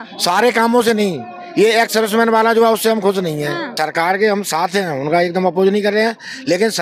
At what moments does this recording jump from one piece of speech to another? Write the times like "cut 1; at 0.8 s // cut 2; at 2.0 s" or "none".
cut 1; at 3.8 s